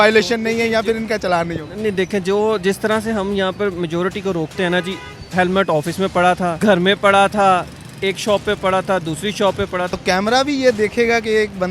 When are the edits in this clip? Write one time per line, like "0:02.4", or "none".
0:06.5
0:09.9

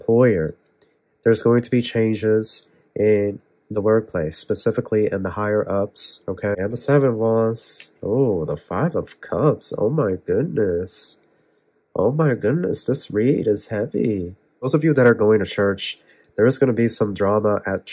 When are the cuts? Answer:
0:06.6
0:14.7

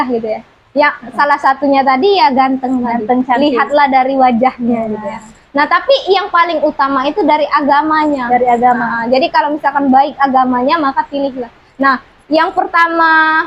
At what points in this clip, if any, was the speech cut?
none

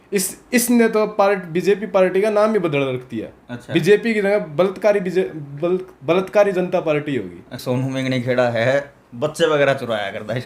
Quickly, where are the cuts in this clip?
0:07.6

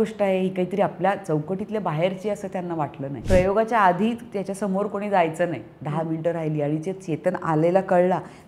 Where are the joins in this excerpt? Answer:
0:03.2

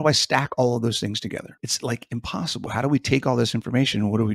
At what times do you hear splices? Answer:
0:01.4
0:02.7

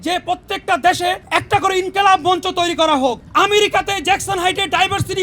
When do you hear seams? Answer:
0:01.2
0:03.2

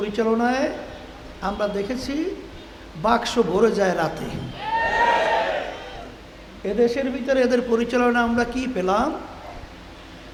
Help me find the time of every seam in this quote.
none

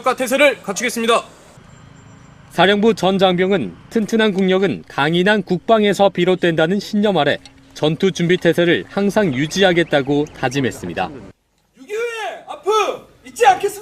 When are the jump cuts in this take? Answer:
0:01.4

